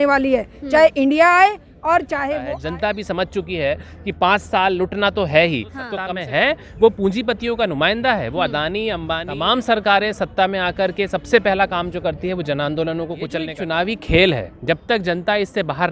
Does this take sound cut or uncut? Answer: cut